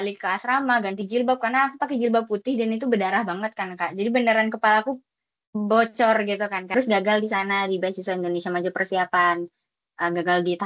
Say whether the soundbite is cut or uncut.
cut